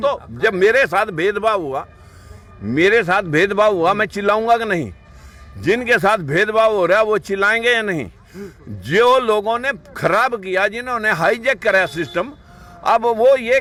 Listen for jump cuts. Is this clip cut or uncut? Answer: uncut